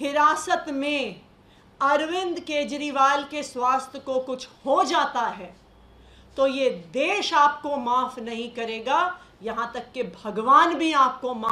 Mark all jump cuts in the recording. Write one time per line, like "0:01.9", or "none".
none